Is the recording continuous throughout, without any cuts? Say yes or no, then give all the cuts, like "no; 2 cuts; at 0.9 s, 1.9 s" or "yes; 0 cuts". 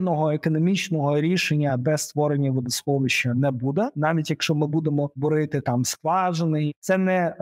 no; 3 cuts; at 3.9 s, 5.1 s, 6.7 s